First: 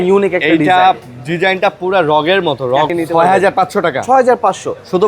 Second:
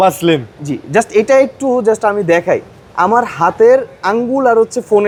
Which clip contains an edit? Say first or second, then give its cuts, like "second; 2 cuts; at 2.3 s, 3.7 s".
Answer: first; 1 cut; at 2.9 s